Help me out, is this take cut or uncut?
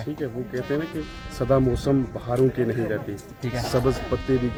uncut